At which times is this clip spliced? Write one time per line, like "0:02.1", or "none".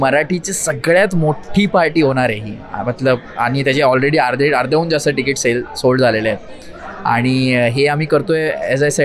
none